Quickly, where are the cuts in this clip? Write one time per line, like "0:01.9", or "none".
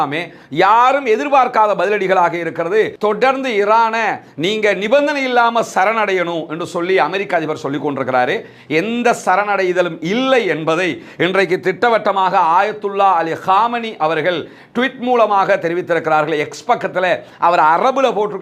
0:02.9